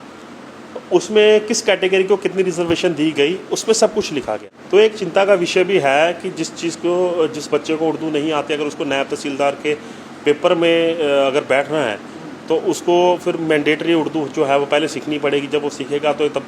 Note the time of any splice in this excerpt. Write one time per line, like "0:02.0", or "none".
0:04.4